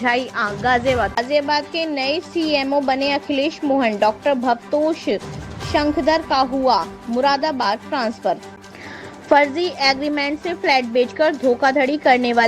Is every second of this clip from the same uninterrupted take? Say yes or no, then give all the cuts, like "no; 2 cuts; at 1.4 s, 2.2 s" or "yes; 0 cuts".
no; 2 cuts; at 1.1 s, 8.5 s